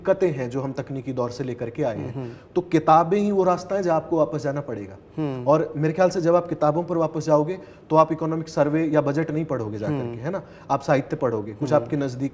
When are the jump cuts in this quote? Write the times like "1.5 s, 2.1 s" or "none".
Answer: none